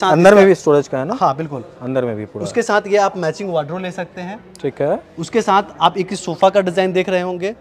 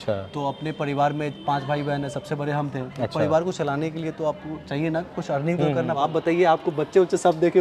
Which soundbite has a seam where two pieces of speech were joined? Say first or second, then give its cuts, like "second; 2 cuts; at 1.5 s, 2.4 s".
second; 1 cut; at 5.9 s